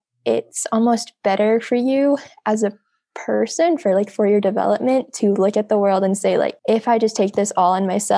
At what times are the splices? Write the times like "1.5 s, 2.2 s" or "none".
6.6 s